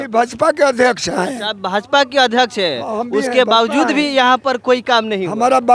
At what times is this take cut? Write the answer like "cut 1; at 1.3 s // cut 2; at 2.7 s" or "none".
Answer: none